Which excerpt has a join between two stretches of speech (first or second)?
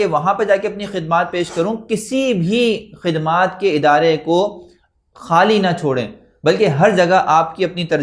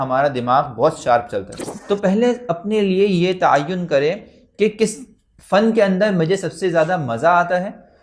second